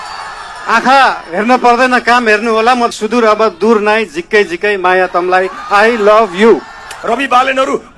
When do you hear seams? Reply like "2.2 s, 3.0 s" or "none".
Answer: 2.9 s, 6.9 s